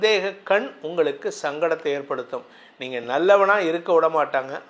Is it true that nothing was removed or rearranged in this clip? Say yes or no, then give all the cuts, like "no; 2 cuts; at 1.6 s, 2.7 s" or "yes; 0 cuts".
yes; 0 cuts